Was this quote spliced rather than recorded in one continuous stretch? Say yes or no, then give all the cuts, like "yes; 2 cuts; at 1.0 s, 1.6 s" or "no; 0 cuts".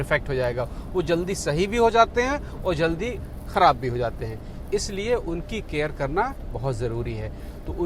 no; 0 cuts